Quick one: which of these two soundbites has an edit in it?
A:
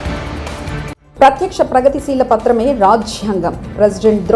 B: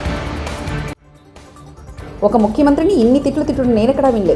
A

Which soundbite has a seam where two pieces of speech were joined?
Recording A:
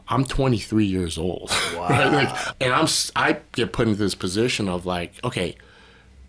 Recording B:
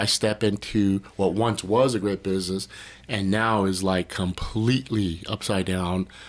A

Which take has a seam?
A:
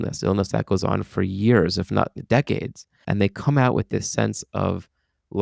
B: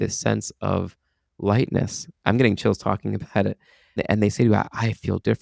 A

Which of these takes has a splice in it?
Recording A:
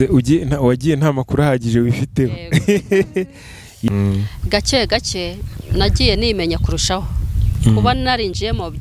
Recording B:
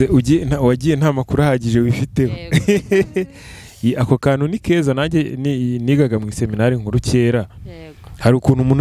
A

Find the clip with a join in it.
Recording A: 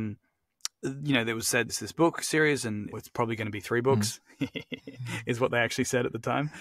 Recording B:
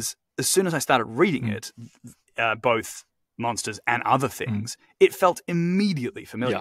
A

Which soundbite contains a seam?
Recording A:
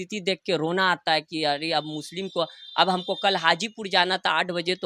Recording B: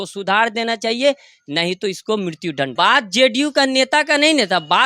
B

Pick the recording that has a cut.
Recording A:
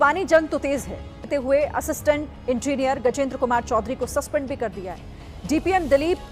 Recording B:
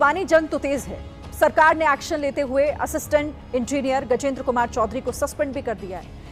A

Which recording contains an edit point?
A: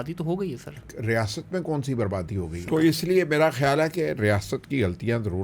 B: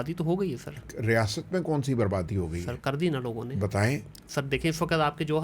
A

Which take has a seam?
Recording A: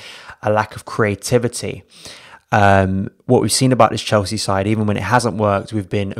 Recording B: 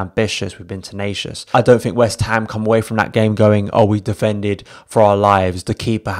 B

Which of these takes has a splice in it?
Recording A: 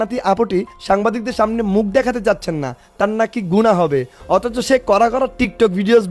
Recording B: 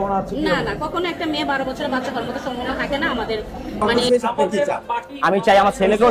B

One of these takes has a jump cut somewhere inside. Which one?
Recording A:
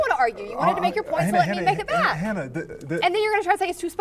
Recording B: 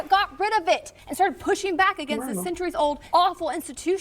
B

